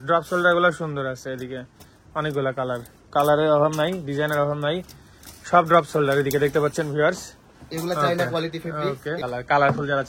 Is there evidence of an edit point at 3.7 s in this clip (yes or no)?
no